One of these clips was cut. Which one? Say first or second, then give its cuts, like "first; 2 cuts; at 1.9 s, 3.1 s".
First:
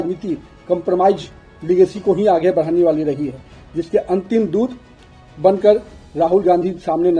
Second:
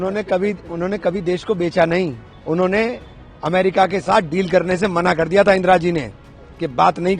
second; 1 cut; at 2.3 s